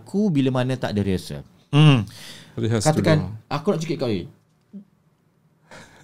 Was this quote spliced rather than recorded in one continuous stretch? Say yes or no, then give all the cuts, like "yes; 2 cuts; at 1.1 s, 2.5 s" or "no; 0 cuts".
no; 0 cuts